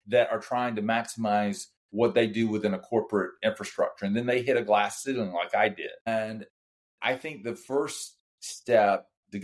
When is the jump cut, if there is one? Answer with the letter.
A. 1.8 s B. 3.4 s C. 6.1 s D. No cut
C